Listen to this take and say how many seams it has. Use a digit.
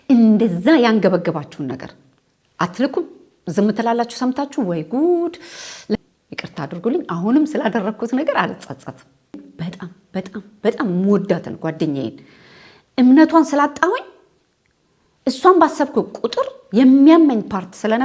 2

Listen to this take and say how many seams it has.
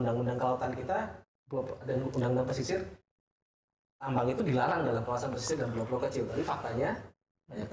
0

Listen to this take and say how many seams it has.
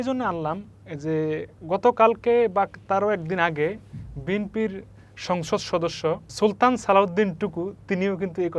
2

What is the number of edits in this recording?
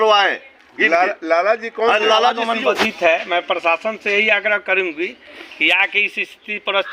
1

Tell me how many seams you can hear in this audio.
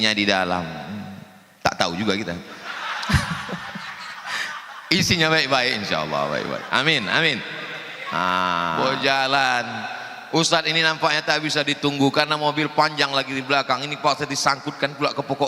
1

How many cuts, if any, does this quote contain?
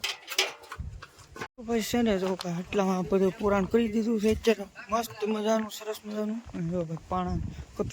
0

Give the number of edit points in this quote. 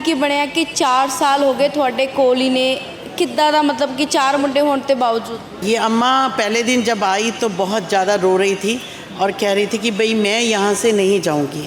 1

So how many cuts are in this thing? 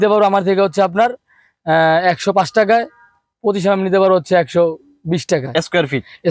0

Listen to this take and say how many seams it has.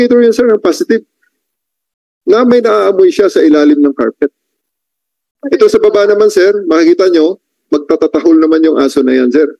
0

